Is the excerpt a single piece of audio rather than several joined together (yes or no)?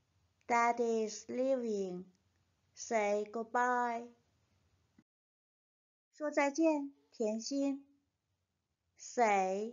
no